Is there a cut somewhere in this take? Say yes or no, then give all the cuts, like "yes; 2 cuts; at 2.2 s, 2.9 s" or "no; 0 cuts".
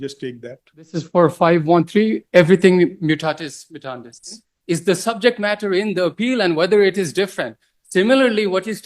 yes; 2 cuts; at 0.9 s, 4.5 s